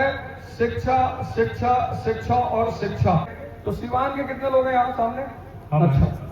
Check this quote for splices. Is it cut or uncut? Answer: cut